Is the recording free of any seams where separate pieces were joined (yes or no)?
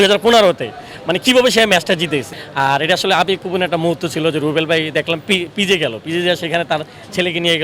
no